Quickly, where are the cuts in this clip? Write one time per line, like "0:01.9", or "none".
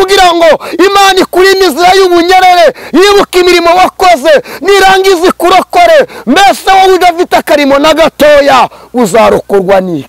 none